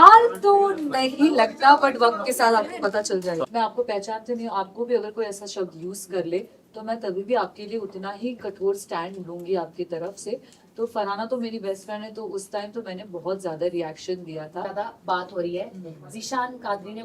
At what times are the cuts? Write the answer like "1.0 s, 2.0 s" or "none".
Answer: 3.5 s, 14.7 s